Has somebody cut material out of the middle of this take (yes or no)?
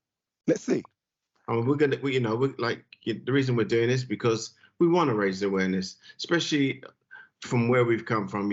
no